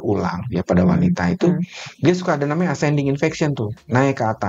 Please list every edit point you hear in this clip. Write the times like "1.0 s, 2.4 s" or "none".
none